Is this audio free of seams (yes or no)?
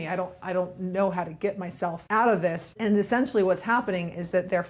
no